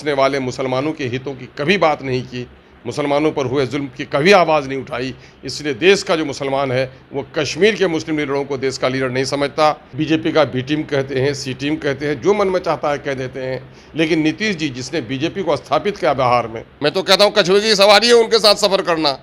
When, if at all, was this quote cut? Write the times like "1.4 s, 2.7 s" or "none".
9.9 s, 16.6 s